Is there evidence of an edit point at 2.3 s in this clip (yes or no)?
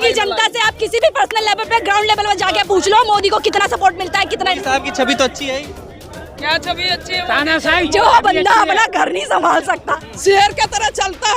no